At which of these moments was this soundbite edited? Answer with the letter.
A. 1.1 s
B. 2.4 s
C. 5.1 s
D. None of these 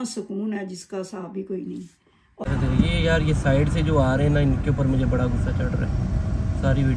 B